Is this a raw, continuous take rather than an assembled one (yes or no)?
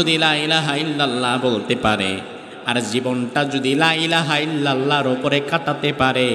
yes